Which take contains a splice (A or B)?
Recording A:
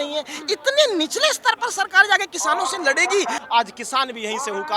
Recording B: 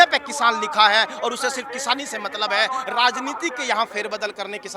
A